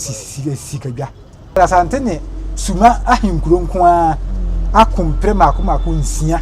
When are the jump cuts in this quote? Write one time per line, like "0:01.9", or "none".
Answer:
0:01.6